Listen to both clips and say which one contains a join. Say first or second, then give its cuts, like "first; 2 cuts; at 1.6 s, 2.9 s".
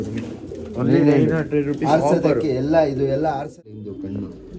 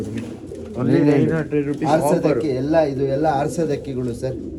first; 1 cut; at 3.6 s